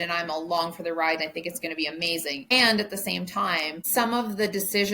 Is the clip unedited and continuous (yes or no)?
no